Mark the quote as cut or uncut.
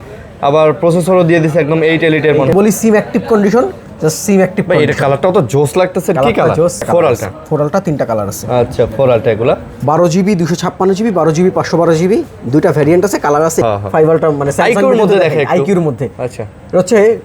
cut